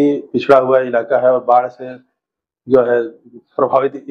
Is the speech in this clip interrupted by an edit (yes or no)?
no